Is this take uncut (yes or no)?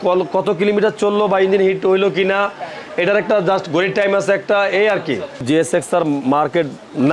no